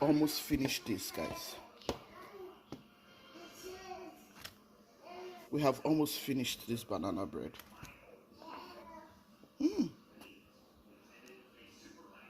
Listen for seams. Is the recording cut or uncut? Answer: cut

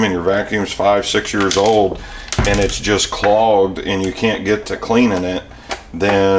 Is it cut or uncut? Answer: uncut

